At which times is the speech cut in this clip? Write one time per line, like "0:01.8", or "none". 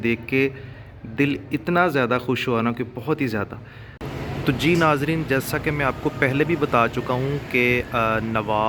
0:04.0

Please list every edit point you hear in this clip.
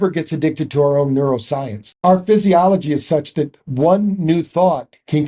0:01.9

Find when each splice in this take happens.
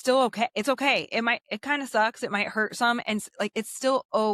none

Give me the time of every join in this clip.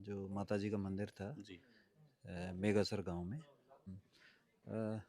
0:04.0

